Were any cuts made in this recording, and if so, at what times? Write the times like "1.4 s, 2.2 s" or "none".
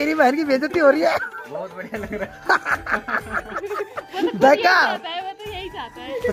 none